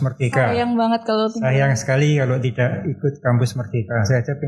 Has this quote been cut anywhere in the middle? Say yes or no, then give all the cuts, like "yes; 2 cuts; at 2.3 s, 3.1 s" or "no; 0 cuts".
no; 0 cuts